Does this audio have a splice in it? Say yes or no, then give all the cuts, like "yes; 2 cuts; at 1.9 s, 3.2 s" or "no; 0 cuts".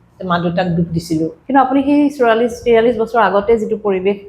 yes; 1 cut; at 1.4 s